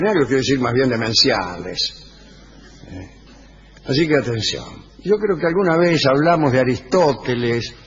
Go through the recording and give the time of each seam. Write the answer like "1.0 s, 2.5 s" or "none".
none